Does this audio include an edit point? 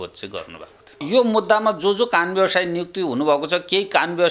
yes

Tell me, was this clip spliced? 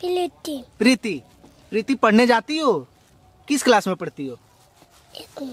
no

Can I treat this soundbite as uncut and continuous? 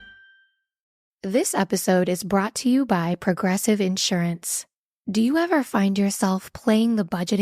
no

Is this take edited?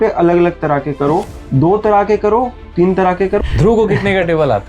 yes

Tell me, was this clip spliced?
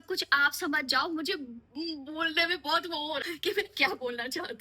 yes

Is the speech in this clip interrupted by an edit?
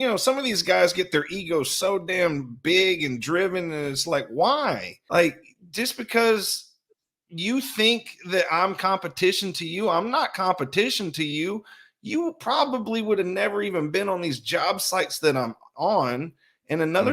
yes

